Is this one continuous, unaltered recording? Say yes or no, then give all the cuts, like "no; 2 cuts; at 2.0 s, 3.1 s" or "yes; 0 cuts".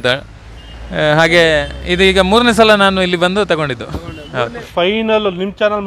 no; 1 cut; at 4.6 s